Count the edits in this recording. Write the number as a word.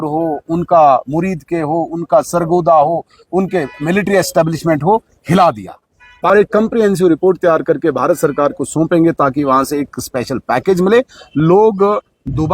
one